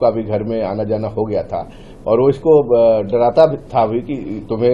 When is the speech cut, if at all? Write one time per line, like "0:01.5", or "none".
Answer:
none

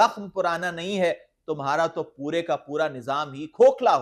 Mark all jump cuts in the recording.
none

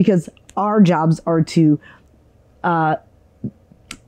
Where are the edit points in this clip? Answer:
none

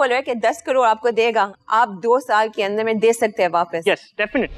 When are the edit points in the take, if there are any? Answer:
none

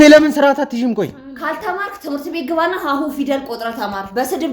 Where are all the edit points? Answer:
none

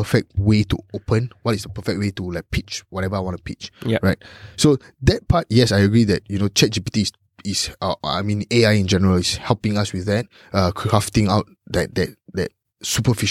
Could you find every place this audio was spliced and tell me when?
none

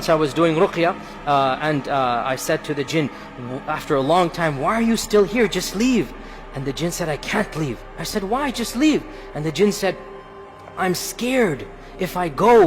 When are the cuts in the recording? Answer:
none

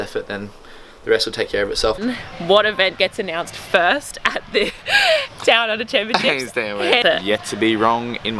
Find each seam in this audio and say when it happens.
0:02.0
0:07.0

